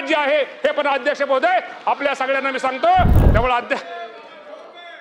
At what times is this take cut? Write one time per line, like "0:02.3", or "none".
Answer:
0:03.2